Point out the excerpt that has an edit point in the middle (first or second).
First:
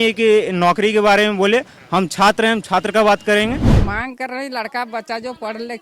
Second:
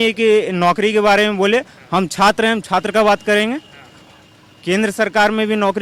first